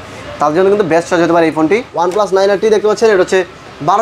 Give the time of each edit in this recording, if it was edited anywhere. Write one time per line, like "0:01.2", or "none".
0:01.9